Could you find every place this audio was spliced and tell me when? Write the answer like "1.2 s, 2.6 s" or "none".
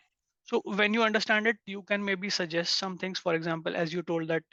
none